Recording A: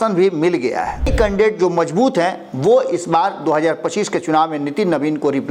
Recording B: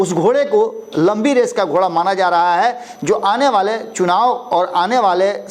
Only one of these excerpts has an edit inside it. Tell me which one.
A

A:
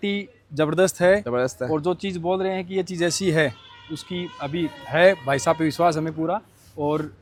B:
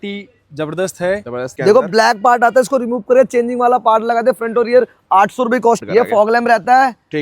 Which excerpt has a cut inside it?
B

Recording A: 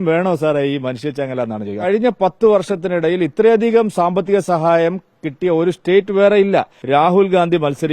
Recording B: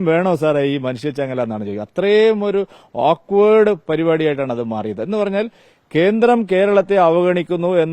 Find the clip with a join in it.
A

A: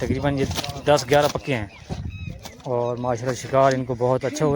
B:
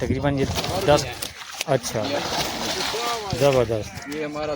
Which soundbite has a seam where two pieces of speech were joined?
B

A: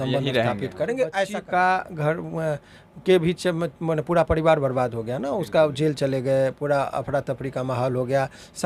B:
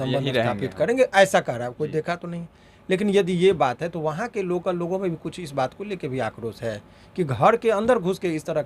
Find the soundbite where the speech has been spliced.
A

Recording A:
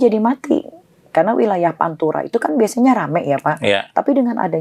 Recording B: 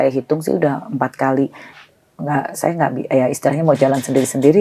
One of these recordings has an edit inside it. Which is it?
B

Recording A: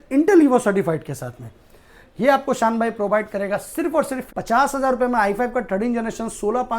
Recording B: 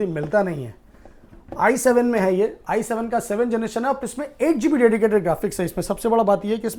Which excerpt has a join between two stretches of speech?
A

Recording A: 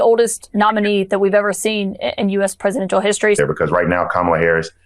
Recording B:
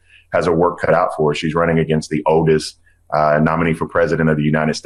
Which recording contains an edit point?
A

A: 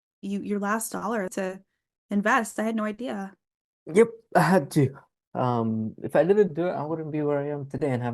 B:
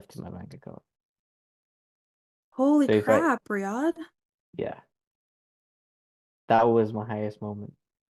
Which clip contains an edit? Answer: A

